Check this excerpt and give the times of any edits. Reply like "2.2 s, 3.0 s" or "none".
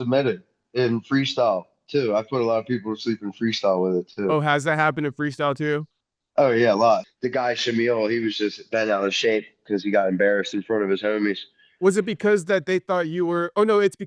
7.1 s